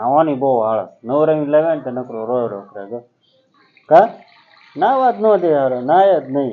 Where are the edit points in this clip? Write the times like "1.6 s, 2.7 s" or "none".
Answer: none